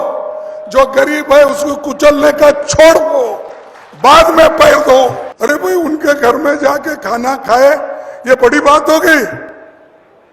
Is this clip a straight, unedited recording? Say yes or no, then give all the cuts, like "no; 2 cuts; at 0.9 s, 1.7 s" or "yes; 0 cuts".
no; 1 cut; at 5.3 s